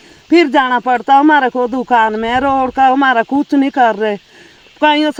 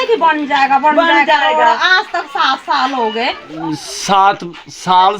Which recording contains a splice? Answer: second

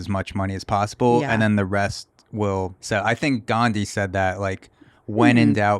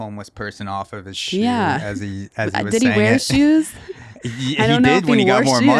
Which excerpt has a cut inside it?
first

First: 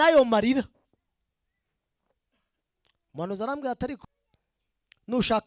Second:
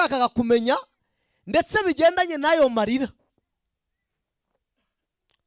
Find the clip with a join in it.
first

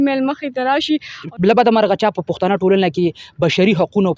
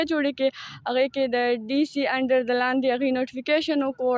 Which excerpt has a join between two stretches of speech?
first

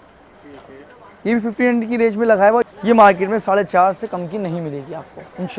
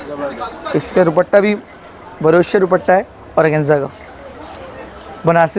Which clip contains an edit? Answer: first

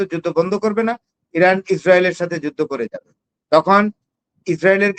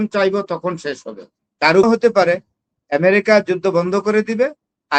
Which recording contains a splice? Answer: second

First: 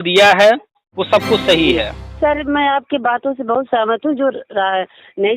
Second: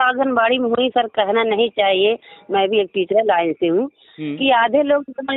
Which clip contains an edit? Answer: first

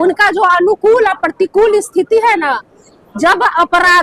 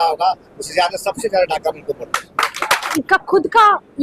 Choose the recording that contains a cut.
second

